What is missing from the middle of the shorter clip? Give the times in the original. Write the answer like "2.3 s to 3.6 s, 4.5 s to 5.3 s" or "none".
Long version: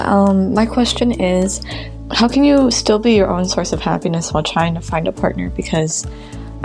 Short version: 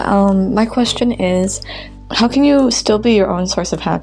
none

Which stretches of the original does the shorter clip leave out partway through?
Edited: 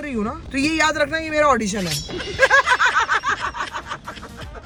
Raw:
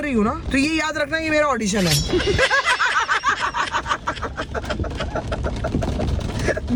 none

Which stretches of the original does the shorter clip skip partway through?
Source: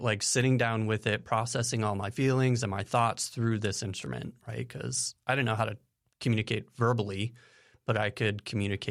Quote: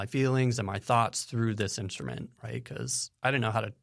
none

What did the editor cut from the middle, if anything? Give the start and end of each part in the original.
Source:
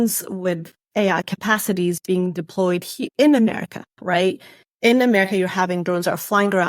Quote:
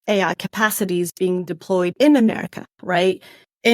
2.8 s to 3.1 s

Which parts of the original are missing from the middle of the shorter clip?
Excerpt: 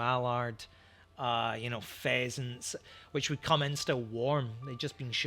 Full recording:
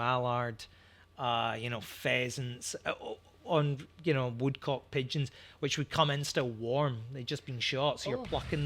2.8 s to 5.3 s

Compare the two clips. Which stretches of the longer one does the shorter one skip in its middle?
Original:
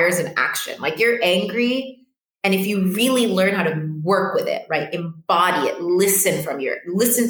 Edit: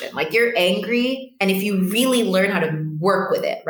1.9 s to 2.3 s

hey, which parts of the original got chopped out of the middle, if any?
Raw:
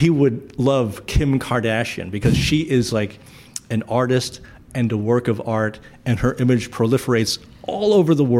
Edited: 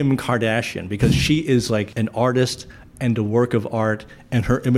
3.1 s to 3.6 s

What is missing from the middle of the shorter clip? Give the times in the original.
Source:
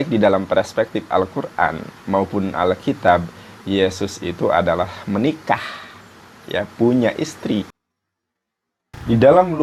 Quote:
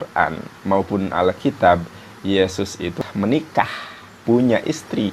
4.4 s to 4.9 s, 6.1 s to 6.7 s

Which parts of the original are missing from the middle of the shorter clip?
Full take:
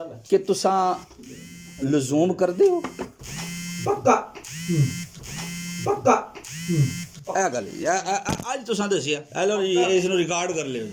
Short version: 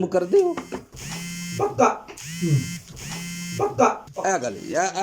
6.3 s to 7.2 s

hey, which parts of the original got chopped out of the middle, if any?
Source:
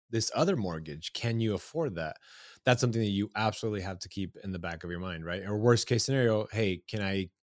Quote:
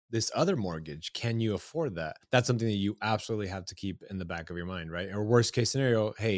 2.2 s to 2.5 s

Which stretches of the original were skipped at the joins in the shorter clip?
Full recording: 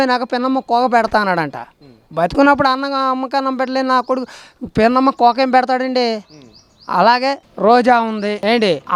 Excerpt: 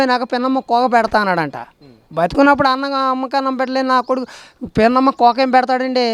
none

